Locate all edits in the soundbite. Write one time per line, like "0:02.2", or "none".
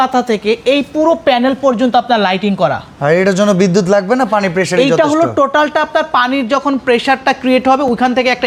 none